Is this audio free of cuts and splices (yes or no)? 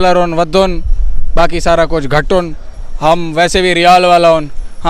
yes